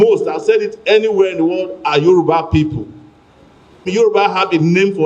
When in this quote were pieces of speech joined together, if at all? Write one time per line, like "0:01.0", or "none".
0:03.8

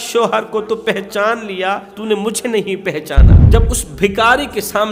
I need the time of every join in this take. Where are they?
0:01.9
0:03.4

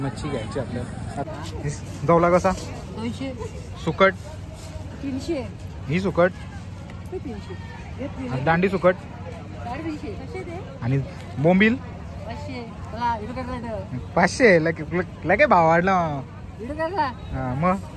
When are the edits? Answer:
0:01.3

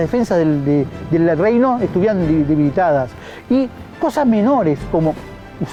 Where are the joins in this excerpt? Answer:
none

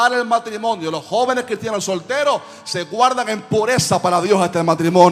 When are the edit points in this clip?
none

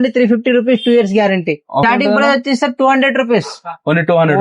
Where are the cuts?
0:01.8

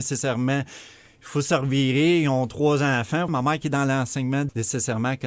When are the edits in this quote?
0:03.3
0:04.5

